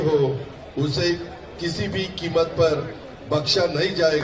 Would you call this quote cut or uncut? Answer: uncut